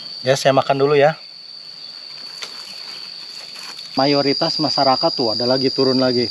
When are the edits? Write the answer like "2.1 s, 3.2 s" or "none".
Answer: 3.9 s